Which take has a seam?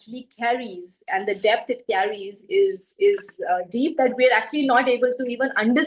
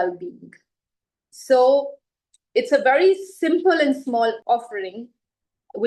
second; 1 cut; at 4.4 s

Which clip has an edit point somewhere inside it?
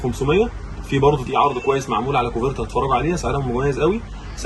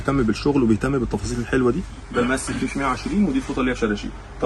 second; 1 cut; at 2.0 s

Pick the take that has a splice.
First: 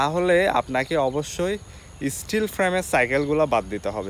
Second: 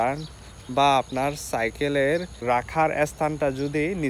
second; 1 cut; at 2.3 s

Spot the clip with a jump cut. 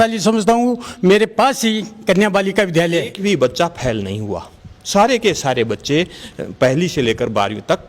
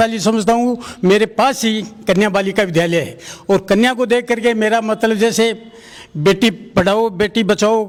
first; 1 cut; at 3.1 s

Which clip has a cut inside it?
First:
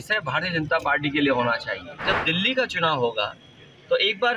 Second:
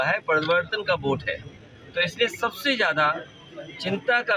first; 1 cut; at 2.0 s

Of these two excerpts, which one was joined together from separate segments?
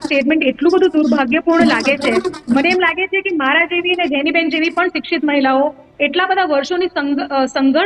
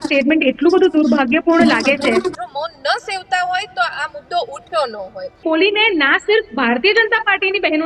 second; 2 cuts; at 2.4 s, 5.4 s

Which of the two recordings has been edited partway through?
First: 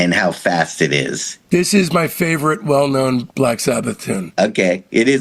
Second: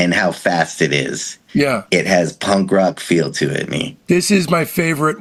first; 2 cuts; at 1.3 s, 4.3 s

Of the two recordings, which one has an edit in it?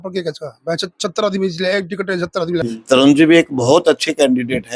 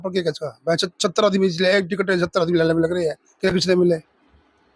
first; 1 cut; at 2.6 s

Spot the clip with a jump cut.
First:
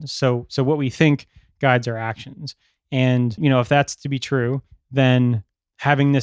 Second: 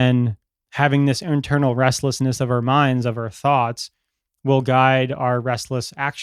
first; 1 cut; at 3.4 s

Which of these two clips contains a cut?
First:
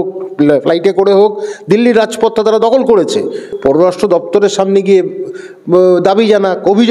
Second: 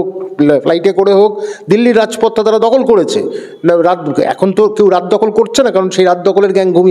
first; 1 cut; at 3.5 s

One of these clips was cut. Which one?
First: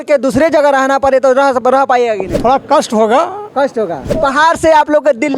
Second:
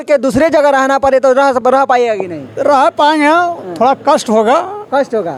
first; 2 cuts; at 2.3 s, 4.1 s

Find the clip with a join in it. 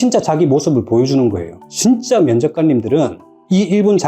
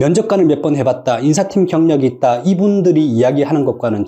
first; 1 cut; at 1.6 s

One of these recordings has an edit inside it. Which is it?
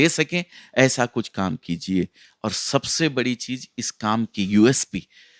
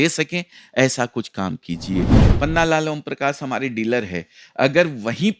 second; 1 cut; at 2.2 s

